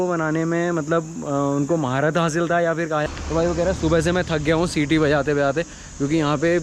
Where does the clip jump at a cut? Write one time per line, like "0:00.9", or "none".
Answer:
0:03.1